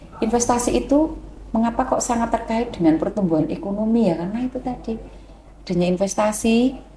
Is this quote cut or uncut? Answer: uncut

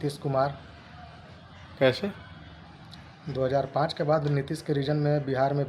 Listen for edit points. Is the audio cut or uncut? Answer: uncut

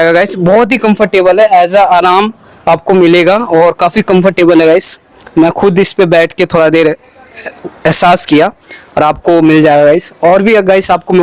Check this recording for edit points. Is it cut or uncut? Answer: uncut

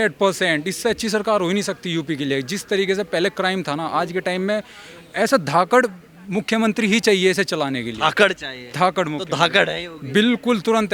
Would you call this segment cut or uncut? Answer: uncut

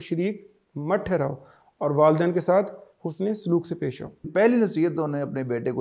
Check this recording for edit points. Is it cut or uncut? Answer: cut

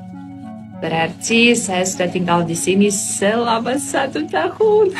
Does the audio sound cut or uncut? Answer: uncut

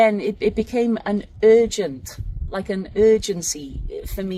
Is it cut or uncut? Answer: uncut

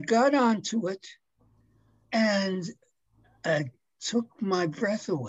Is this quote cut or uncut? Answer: uncut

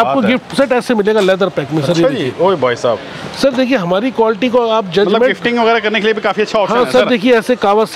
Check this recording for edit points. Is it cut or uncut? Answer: uncut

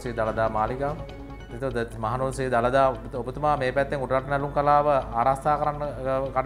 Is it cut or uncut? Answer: uncut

